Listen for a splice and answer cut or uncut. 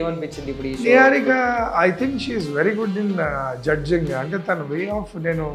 uncut